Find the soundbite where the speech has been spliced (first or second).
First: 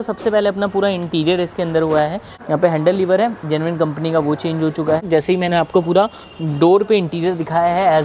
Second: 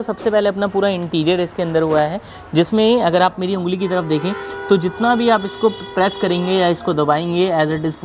first